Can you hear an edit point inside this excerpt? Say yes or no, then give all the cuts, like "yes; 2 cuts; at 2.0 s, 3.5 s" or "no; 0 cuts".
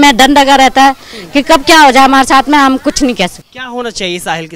yes; 1 cut; at 3.5 s